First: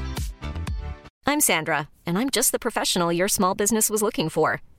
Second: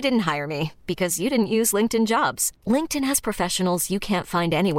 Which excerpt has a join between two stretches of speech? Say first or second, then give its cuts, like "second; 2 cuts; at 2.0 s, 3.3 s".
first; 1 cut; at 1.0 s